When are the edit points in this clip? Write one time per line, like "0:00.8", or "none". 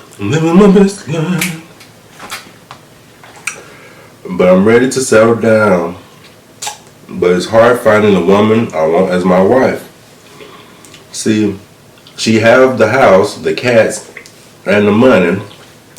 none